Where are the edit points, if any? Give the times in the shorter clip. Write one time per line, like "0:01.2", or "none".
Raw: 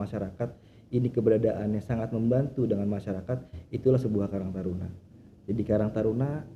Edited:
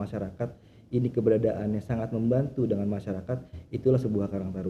none